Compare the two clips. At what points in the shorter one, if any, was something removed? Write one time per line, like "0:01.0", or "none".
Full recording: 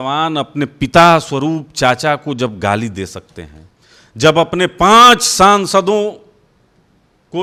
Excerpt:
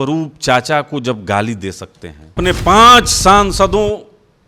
0:02.4